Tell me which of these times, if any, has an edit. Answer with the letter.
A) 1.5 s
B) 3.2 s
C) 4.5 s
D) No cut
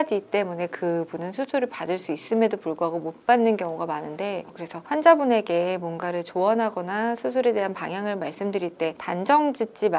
C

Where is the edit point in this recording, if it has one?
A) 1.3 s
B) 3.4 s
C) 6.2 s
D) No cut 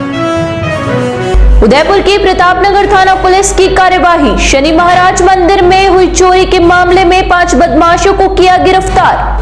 D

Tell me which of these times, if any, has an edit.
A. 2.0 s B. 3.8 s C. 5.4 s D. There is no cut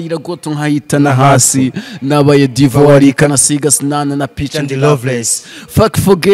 D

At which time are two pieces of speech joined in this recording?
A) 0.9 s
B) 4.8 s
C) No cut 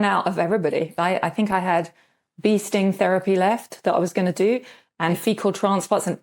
A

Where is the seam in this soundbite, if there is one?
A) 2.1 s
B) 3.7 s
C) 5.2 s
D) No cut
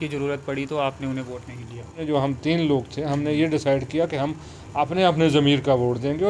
A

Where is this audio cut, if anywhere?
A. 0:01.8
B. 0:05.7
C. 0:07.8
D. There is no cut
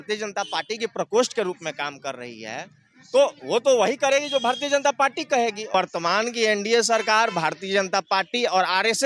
B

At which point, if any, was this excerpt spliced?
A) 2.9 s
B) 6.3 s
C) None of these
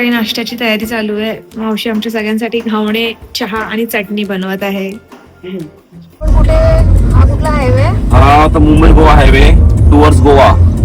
B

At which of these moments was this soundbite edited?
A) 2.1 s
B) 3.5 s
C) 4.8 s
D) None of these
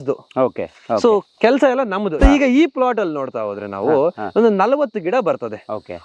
A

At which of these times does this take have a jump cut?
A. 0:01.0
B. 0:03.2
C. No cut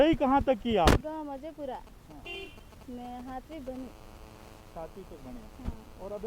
A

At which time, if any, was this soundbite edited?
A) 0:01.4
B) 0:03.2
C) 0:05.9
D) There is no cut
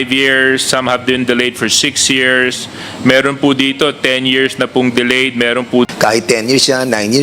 C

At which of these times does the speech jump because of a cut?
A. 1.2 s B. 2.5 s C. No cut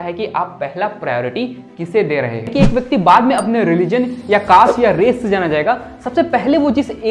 B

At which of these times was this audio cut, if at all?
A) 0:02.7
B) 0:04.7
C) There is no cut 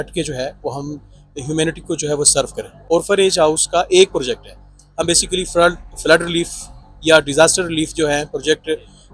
A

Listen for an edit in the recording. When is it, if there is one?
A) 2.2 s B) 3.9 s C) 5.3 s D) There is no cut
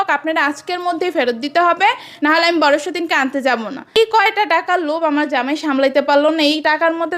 B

